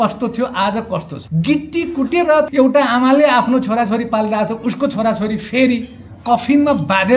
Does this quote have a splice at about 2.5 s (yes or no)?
yes